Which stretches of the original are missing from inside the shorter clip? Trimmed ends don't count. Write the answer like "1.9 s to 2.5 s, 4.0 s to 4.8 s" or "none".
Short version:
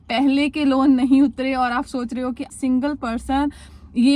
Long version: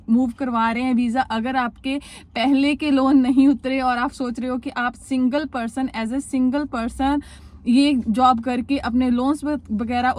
4.8 s to 6.2 s